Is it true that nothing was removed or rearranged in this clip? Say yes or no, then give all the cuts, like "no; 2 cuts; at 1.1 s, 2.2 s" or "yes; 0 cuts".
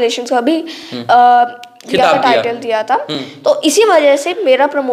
yes; 0 cuts